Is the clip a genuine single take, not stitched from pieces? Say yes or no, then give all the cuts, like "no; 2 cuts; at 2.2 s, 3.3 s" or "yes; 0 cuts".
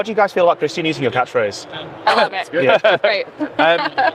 yes; 0 cuts